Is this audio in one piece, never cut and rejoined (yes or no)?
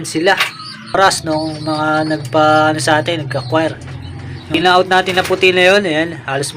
no